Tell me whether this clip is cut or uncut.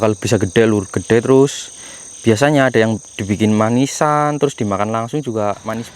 uncut